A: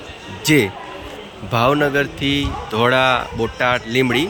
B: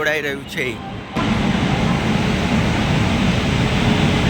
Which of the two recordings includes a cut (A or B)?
B